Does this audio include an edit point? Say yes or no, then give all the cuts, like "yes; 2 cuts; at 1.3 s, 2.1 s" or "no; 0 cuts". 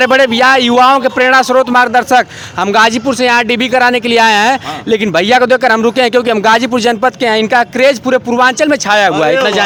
no; 0 cuts